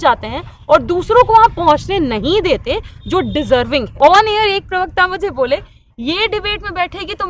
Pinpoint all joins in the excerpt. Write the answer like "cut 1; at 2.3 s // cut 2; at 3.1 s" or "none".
cut 1; at 3.9 s